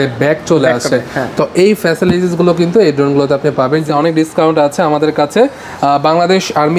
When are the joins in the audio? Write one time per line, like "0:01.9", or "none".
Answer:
0:03.9